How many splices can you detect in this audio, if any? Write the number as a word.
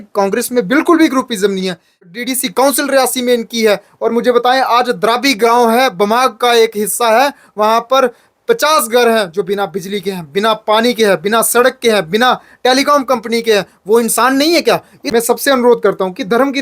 two